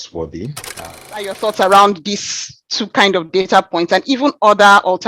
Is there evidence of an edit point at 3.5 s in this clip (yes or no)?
no